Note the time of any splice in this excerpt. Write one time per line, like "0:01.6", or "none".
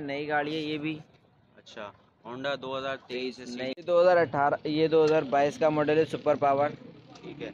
0:03.8